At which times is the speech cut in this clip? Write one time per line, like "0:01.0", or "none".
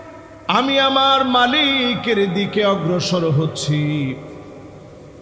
none

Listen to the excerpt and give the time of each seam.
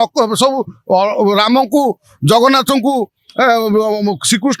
none

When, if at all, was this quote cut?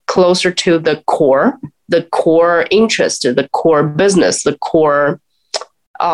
none

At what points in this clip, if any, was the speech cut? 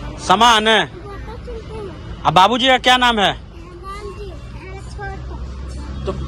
none

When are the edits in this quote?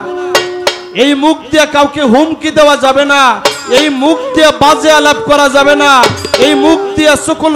none

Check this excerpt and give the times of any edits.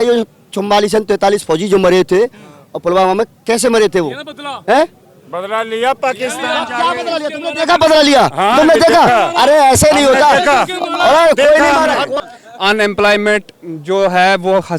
0:12.1

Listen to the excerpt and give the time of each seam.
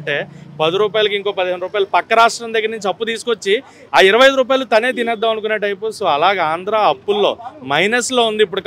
none

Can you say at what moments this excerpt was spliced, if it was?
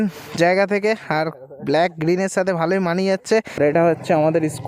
0:03.5

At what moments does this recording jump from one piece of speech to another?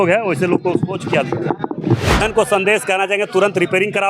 0:02.2

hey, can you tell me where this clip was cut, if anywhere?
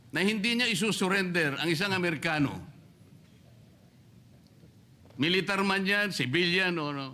none

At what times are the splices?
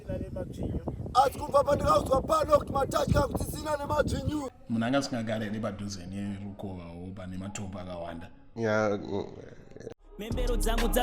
0:04.6
0:10.0

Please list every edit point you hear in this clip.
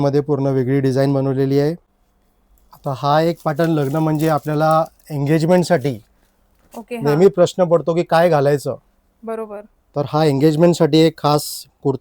0:01.9

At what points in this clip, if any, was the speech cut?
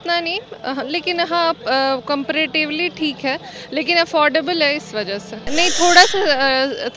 0:05.4

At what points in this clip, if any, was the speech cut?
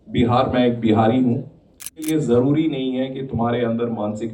0:02.0

